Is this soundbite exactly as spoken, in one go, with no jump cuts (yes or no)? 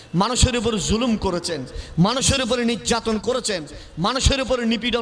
yes